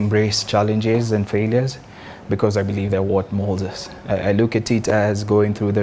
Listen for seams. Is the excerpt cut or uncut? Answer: uncut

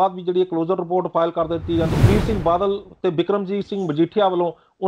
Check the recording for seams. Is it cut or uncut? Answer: cut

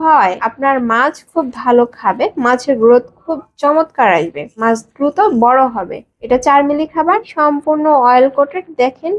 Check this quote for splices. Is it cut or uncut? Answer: cut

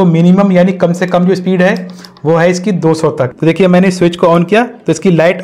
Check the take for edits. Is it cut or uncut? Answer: cut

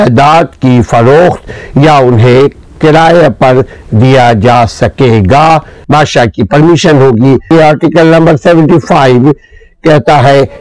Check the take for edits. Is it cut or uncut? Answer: cut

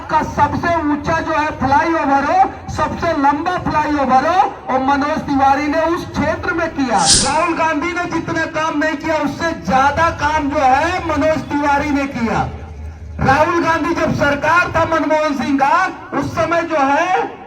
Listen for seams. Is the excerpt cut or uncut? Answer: cut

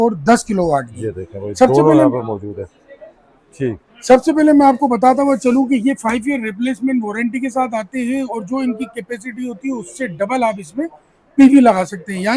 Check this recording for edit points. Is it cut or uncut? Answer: uncut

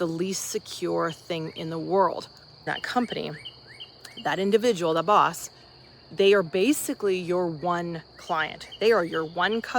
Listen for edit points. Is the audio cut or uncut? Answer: cut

